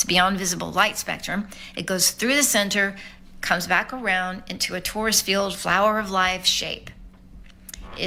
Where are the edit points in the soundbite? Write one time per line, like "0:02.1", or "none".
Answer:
none